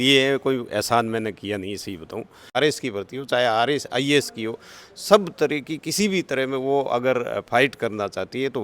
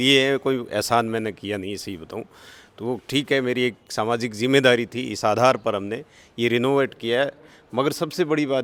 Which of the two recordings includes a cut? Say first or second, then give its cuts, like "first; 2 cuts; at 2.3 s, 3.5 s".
first; 1 cut; at 2.6 s